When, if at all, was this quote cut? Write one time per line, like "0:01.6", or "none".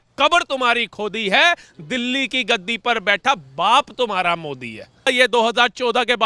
0:05.1